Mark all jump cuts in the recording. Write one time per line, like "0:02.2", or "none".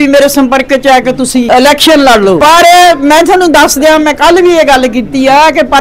0:01.5
0:02.4